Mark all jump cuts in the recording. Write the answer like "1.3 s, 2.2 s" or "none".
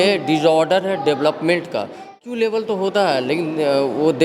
2.1 s